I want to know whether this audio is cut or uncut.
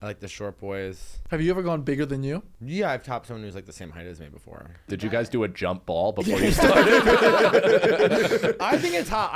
cut